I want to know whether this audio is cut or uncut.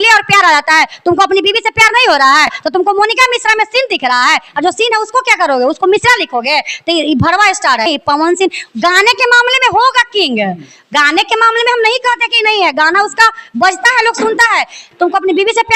cut